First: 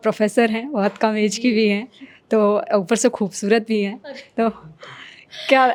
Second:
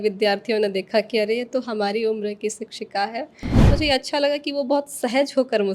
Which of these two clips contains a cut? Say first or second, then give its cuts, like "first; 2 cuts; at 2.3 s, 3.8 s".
second; 1 cut; at 3.7 s